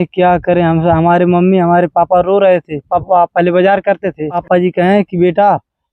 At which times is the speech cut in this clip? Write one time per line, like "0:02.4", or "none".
0:02.9
0:04.4